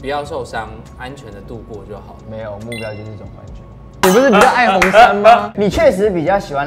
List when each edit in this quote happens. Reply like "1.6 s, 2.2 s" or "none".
4.0 s